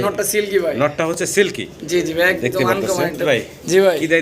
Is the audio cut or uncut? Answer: cut